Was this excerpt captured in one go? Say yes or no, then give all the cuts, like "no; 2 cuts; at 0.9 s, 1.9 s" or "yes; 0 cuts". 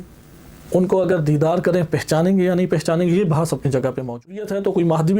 no; 1 cut; at 4.2 s